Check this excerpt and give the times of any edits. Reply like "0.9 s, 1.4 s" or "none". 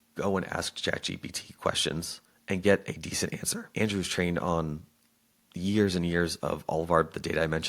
3.7 s